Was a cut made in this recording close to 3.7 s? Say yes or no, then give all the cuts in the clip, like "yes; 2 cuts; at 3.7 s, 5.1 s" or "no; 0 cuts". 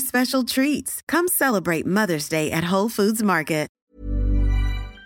yes; 1 cut; at 3.7 s